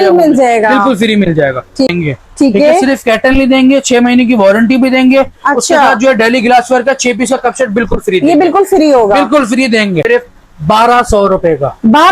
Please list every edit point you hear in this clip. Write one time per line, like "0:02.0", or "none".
0:01.9
0:10.0

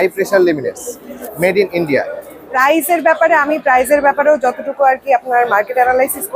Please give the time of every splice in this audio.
0:01.3
0:02.5

